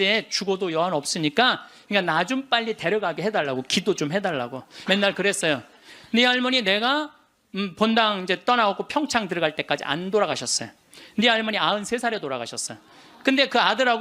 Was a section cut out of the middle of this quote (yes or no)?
yes